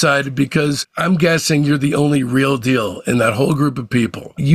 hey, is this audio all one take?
yes; 0 cuts

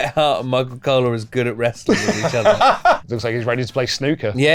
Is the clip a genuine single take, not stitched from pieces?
no; 1 cut; at 3.1 s

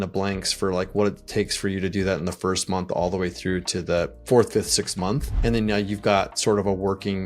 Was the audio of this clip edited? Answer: yes; 2 cuts; at 4.2 s, 5.3 s

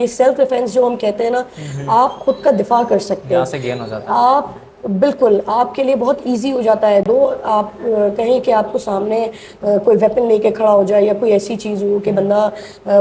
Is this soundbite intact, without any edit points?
yes; 0 cuts

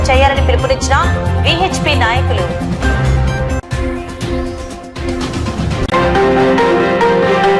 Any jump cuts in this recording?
yes; 1 cut; at 5.8 s

